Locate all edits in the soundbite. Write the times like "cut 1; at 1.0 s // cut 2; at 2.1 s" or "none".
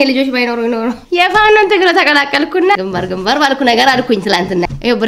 cut 1; at 1.0 s // cut 2; at 2.8 s